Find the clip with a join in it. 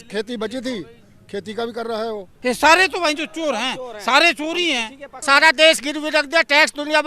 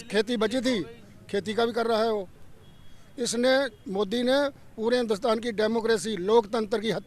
first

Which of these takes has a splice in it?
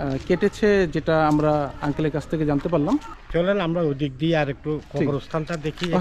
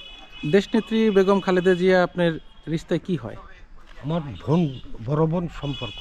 first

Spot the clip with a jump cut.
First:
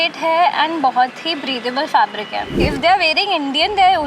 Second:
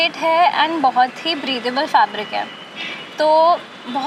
first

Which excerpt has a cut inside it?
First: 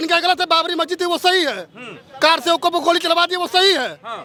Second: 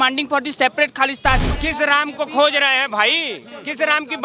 second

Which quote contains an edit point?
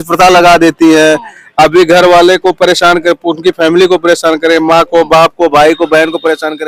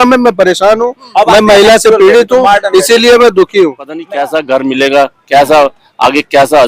second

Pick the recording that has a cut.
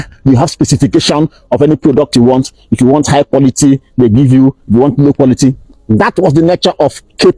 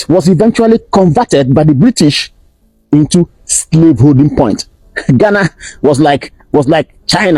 second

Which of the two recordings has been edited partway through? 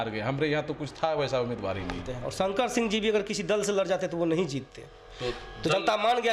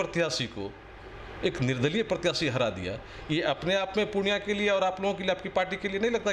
first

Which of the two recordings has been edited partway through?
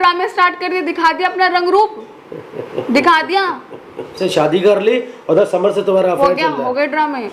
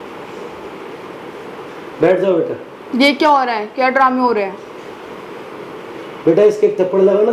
first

